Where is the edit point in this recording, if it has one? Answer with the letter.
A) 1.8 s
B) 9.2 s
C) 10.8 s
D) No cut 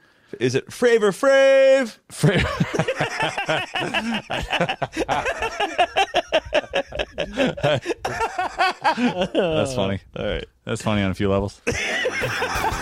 B